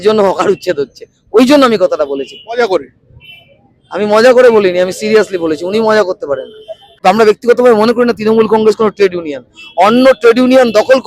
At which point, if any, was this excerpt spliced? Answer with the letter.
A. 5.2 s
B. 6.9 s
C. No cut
B